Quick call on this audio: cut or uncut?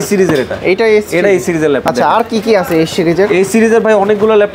uncut